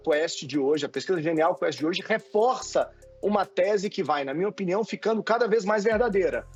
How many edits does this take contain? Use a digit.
0